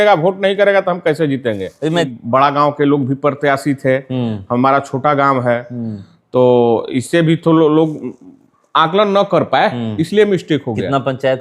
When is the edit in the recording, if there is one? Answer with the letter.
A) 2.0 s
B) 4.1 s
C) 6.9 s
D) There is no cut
A